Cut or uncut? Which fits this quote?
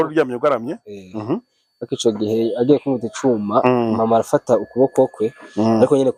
uncut